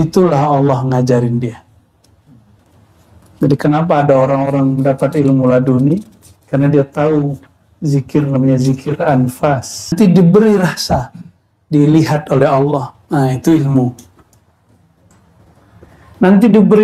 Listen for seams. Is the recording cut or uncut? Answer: cut